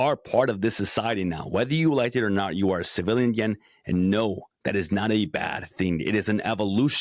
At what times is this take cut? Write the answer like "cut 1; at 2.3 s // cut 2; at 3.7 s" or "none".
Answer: none